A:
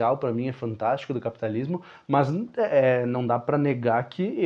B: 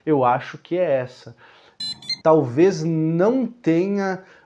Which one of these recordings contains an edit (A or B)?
B